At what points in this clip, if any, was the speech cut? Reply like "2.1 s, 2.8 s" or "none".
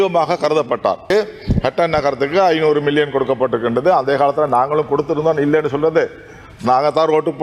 1.0 s

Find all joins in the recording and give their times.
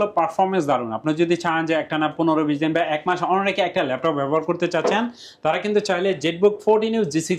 none

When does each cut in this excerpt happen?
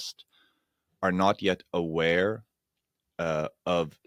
none

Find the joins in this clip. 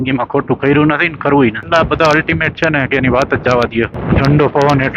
1.6 s, 4.0 s

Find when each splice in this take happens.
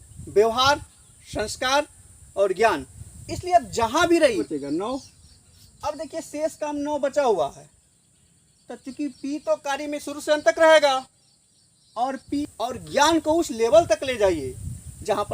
4.4 s, 12.4 s

